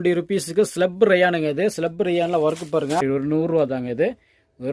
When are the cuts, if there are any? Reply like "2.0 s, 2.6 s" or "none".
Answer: 3.0 s